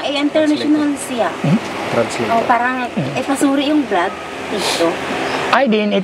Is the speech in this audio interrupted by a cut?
no; 0 cuts

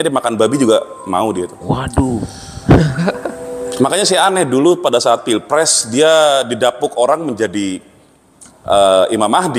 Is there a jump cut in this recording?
no; 0 cuts

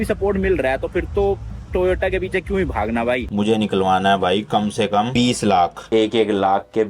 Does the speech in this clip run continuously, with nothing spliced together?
no; 3 cuts; at 3.3 s, 5.1 s, 5.8 s

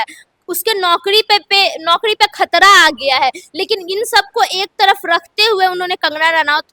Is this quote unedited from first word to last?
yes; 0 cuts

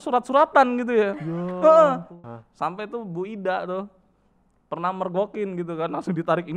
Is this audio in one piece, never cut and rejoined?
no; 1 cut; at 2.1 s

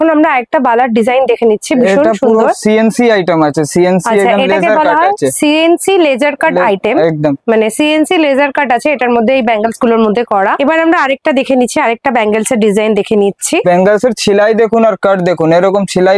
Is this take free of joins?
yes; 0 cuts

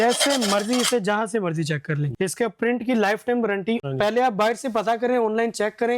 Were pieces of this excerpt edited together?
yes; 2 cuts; at 2.1 s, 3.8 s

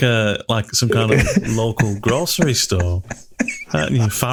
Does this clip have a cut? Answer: no; 0 cuts

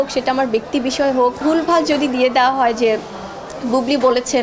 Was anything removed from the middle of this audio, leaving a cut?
yes; 1 cut; at 1.4 s

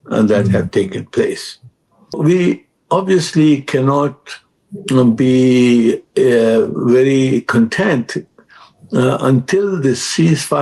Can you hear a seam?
yes; 1 cut; at 2.2 s

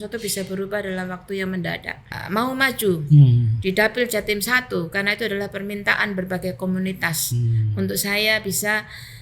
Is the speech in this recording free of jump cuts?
no; 1 cut; at 2.1 s

